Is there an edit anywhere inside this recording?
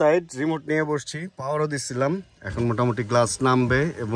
no; 0 cuts

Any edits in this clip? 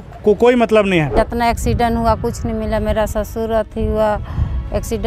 yes; 1 cut; at 1.1 s

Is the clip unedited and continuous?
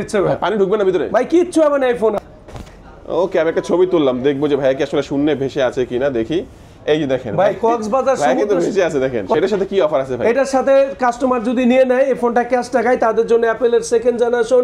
no; 2 cuts; at 2.2 s, 9.3 s

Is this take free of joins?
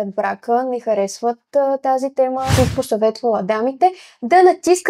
no; 1 cut; at 2.5 s

